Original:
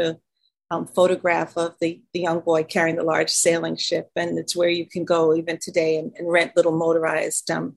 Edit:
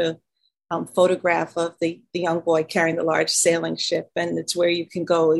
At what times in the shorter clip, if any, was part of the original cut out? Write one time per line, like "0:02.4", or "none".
none

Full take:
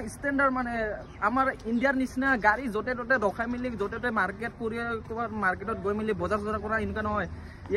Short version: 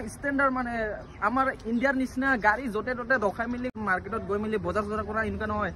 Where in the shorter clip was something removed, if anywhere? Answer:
0:03.7

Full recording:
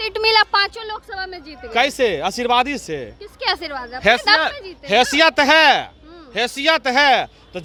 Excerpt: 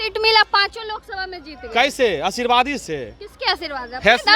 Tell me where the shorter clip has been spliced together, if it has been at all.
none

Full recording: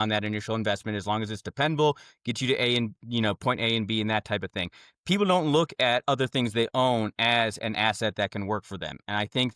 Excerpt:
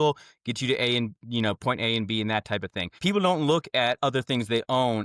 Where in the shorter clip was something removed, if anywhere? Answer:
0:02.8

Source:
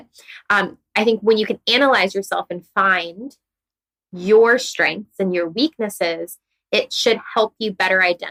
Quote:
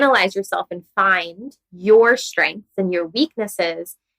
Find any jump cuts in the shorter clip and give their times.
0:01.7

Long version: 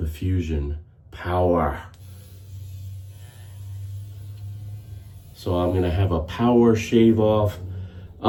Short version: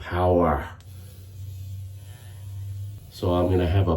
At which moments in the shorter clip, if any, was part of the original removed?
0:03.0

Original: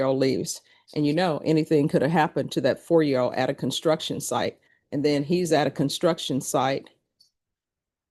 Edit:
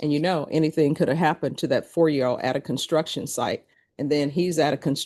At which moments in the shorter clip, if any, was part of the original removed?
none

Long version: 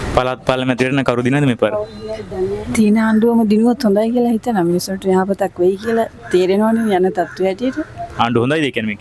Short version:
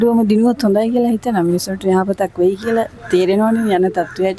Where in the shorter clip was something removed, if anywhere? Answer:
none

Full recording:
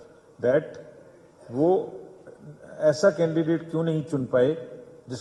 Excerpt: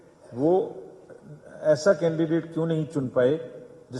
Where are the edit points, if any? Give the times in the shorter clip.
none

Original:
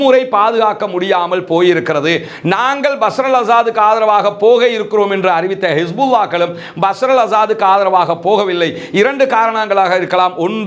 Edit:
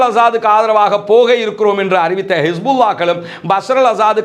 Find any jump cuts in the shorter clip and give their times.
none

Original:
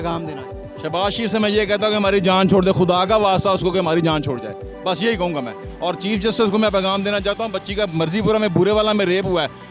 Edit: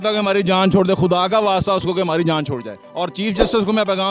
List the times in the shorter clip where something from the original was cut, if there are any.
0:02.8

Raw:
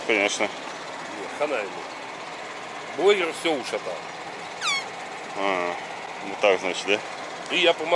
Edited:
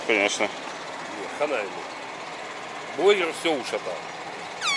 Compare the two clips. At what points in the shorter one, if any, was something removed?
none

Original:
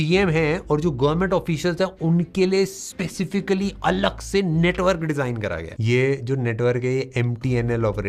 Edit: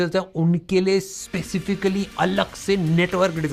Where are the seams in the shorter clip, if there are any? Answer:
none

